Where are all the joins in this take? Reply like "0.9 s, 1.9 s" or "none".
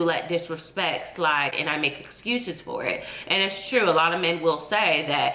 none